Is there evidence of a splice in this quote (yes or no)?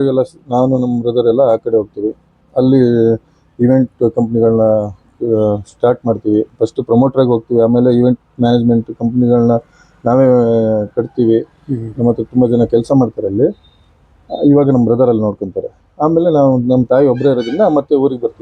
no